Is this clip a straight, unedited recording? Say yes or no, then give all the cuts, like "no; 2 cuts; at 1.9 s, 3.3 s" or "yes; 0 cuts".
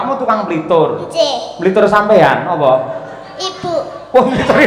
yes; 0 cuts